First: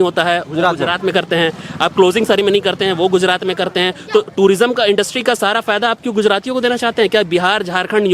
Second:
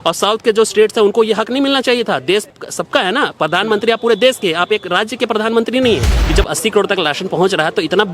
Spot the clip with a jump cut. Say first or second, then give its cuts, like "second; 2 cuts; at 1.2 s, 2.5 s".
second; 2 cuts; at 2.5 s, 6.2 s